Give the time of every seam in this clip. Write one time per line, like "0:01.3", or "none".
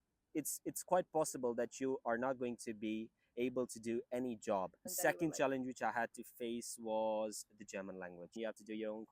0:04.9
0:08.4

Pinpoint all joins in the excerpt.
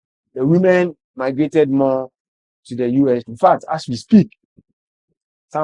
0:03.3

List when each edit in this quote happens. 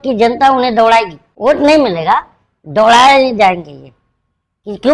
0:01.2

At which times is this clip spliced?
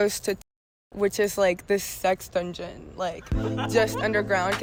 none

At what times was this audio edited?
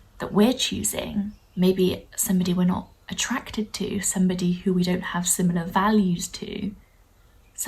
0:01.4

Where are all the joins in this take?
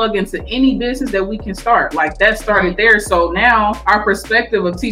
0:03.8

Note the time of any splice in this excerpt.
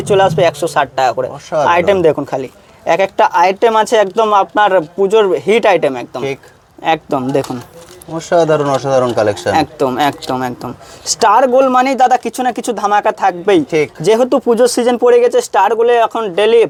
none

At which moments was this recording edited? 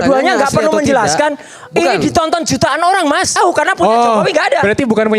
0:03.3

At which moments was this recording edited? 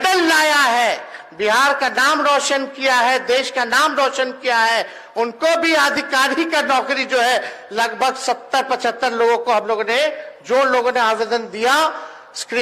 none

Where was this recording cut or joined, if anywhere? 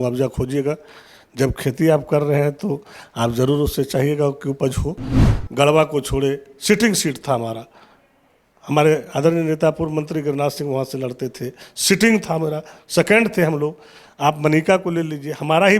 0:05.3

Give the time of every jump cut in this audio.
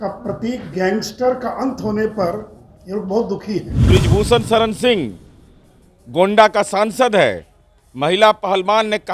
0:03.7

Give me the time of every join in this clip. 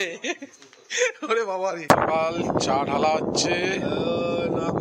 0:01.8

